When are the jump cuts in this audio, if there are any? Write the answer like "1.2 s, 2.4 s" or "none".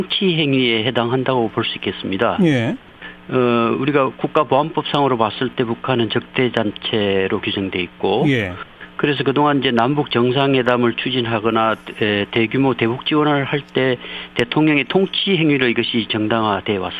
4.9 s